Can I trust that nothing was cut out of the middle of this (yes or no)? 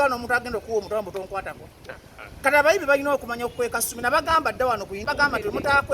no